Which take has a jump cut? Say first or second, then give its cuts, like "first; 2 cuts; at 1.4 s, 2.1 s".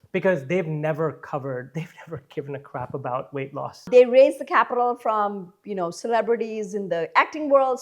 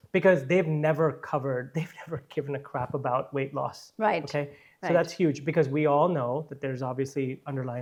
first; 1 cut; at 3.9 s